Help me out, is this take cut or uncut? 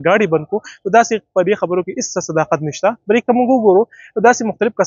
uncut